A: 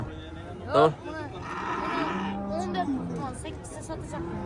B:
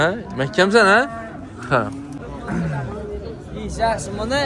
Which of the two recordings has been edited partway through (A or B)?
B